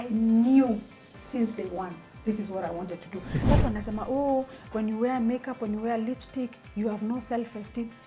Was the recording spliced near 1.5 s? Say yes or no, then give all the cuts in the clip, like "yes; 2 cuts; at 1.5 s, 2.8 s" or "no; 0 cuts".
no; 1 cut; at 3.4 s